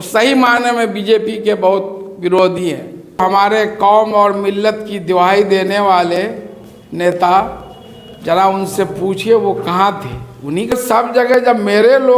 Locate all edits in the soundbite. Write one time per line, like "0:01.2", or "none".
0:03.4
0:10.7

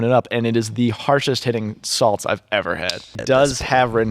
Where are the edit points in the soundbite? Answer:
0:03.1

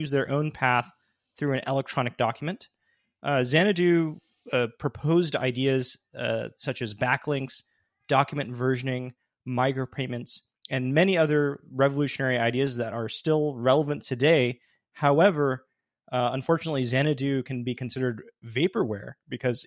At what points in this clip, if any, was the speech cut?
none

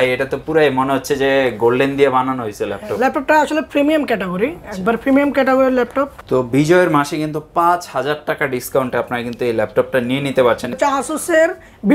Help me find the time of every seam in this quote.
0:06.2
0:10.7

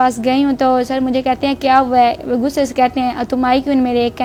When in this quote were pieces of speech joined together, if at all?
none

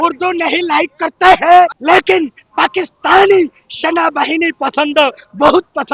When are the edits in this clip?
0:01.8

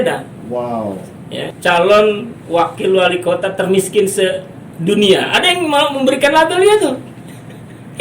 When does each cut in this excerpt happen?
0:01.5

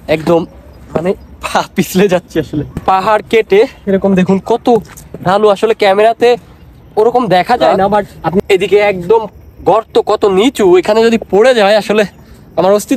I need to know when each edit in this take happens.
0:02.8
0:08.4

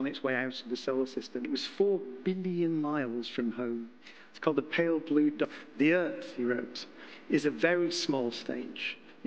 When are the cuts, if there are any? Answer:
0:01.5
0:05.5

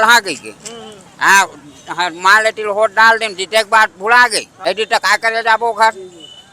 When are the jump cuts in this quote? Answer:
0:04.5

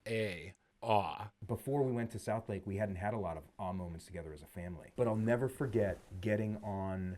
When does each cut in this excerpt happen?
0:01.4
0:04.9
0:06.1

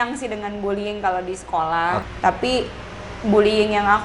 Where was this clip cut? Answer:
0:02.0

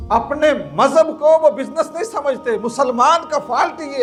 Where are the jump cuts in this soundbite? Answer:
none

